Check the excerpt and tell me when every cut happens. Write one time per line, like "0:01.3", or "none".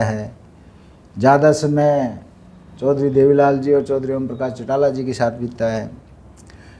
none